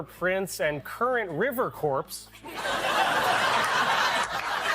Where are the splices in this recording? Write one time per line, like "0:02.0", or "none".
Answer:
0:03.8